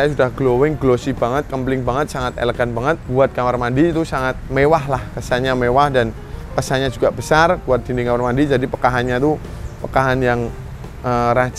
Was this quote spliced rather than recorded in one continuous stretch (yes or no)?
yes